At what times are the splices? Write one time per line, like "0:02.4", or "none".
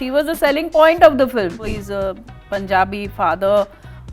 0:01.6